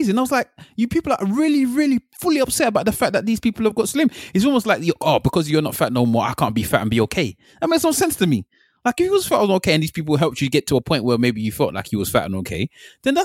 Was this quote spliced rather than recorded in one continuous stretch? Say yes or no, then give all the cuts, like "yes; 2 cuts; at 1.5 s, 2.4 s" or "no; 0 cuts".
no; 0 cuts